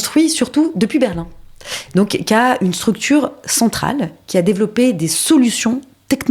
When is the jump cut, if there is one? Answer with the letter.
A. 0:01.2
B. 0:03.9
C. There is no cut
C